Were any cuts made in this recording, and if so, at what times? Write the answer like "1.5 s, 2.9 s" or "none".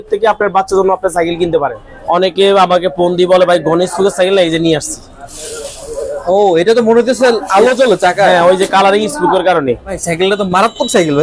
1.9 s, 10.0 s